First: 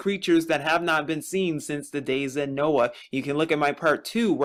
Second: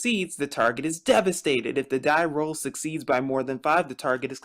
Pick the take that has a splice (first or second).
second